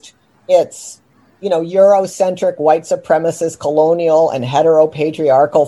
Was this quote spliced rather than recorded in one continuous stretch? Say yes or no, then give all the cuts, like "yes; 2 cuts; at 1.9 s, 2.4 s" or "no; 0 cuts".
no; 0 cuts